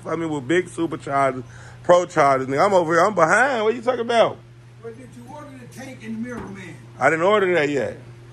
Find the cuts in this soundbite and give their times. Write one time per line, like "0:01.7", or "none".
none